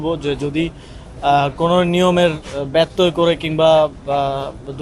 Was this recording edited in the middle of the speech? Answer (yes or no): no